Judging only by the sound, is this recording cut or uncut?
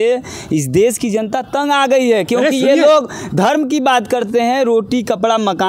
uncut